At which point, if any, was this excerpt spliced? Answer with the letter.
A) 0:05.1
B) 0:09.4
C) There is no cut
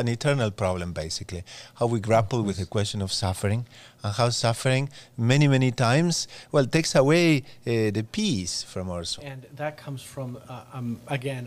B